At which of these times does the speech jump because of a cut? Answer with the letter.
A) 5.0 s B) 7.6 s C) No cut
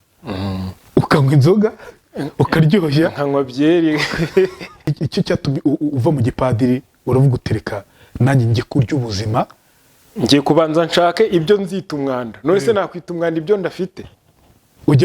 A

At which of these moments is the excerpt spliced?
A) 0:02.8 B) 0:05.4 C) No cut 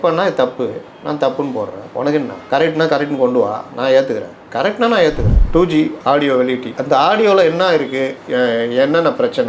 B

